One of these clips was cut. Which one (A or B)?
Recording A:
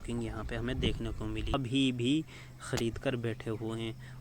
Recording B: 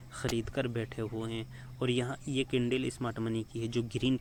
A